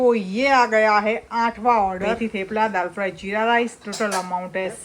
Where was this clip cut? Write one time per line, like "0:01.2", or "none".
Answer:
0:02.2